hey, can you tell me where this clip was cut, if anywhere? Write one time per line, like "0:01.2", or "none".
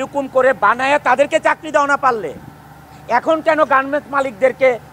none